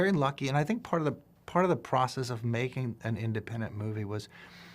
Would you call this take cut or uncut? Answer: cut